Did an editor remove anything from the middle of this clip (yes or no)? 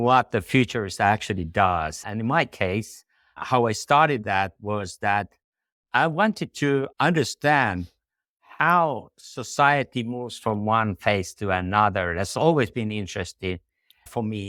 no